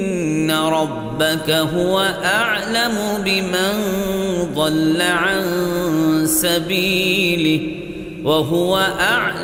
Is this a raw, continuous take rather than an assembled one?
yes; 0 cuts

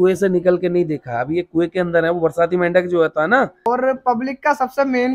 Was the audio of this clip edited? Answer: yes; 1 cut; at 3.6 s

